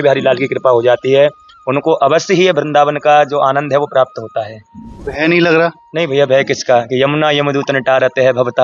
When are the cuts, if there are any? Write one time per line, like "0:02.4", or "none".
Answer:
none